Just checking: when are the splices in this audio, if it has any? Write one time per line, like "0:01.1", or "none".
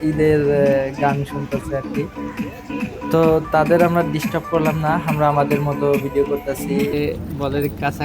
0:06.9